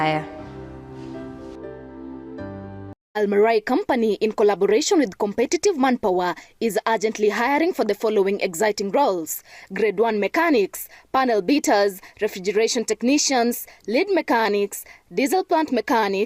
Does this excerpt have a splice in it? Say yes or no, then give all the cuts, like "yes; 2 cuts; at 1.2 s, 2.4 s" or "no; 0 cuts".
yes; 1 cut; at 3.0 s